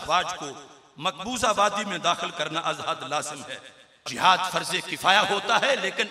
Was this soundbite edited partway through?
yes; 1 cut; at 4.1 s

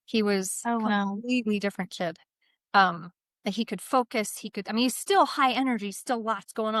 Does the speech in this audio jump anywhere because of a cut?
no; 0 cuts

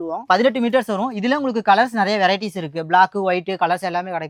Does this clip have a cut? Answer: no; 0 cuts

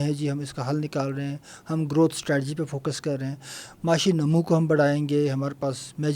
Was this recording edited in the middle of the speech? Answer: no; 0 cuts

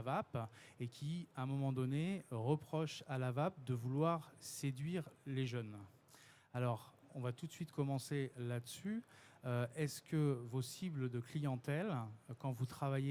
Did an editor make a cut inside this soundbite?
no; 0 cuts

